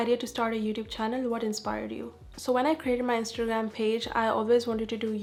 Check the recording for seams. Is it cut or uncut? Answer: uncut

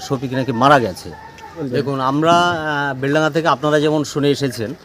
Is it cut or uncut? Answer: cut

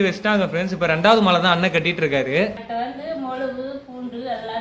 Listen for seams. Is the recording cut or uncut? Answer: cut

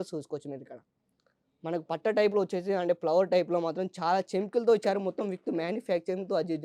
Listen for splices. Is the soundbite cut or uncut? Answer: uncut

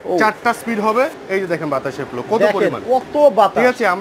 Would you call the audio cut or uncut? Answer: cut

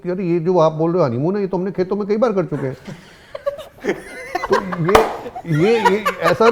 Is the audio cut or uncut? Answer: uncut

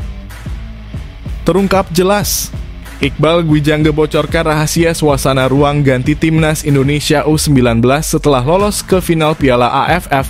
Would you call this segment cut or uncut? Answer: uncut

